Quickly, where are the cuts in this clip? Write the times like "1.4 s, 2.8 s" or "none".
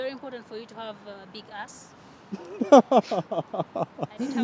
none